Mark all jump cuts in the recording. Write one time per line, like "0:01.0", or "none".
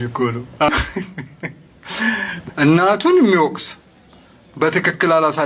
0:00.7
0:02.3